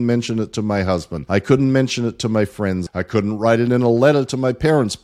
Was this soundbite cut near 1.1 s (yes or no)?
yes